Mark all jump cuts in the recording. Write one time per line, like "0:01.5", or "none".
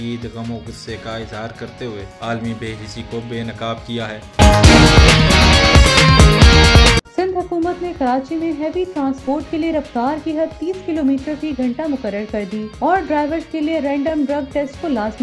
0:04.2
0:07.0